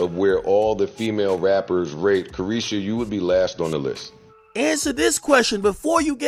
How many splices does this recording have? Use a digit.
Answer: 1